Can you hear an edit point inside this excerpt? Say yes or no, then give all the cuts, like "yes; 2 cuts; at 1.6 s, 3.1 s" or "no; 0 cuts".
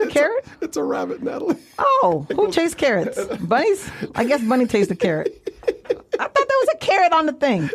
no; 0 cuts